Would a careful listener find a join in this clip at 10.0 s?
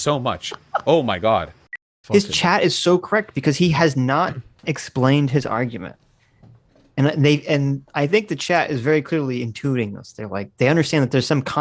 no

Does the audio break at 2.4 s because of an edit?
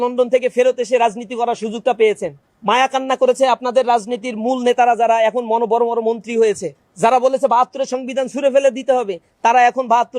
no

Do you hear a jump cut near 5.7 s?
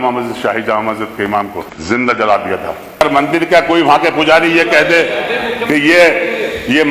no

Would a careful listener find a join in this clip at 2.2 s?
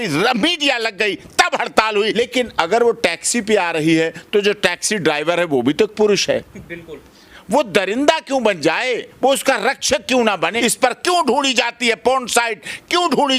yes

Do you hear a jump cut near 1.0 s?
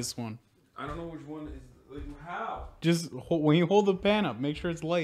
no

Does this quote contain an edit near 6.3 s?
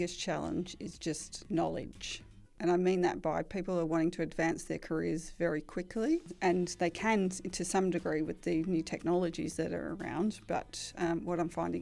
yes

